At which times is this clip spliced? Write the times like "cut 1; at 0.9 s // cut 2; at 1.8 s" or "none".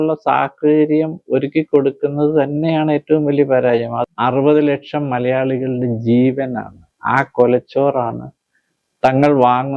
cut 1; at 4.0 s

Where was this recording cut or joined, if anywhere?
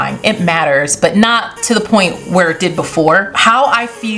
cut 1; at 3.3 s

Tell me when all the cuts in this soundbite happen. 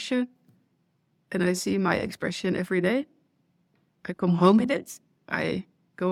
none

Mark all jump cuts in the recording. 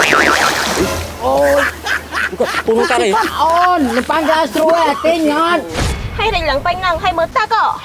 cut 1; at 5.9 s

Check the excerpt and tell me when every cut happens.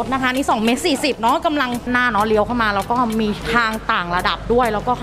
cut 1; at 1.9 s

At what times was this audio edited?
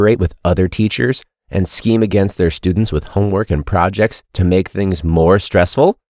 none

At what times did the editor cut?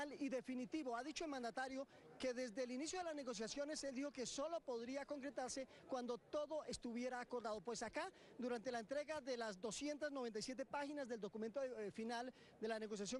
none

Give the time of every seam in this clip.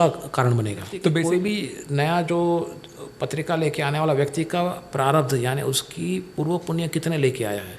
cut 1; at 1.0 s

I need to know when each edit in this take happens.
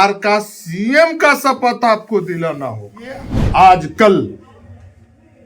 cut 1; at 3.3 s

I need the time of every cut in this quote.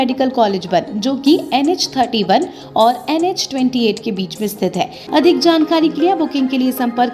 cut 1; at 5.0 s

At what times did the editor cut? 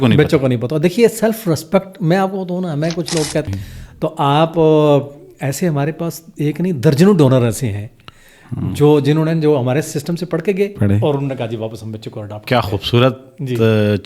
cut 1; at 3.5 s

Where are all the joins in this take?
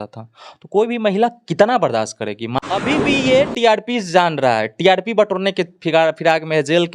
cut 1; at 2.5 s

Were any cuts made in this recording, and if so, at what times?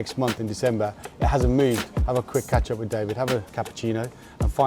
cut 1; at 1.9 s // cut 2; at 3.5 s

